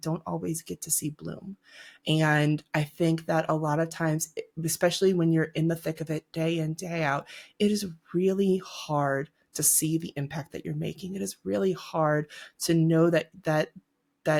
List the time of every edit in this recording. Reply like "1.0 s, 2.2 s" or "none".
none